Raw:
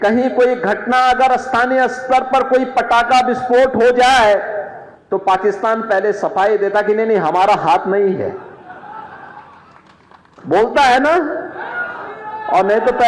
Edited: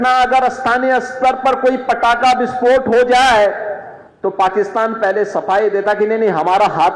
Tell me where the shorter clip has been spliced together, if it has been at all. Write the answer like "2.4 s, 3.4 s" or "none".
none